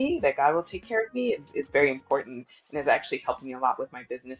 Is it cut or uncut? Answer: uncut